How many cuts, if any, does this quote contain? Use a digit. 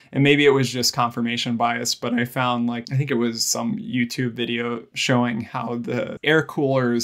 3